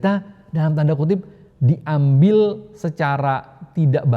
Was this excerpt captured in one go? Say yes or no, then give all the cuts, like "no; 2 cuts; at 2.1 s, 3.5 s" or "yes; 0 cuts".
yes; 0 cuts